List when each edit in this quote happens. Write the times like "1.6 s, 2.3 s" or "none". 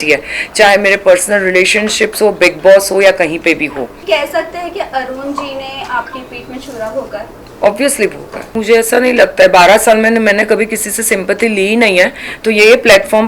3.9 s, 8.3 s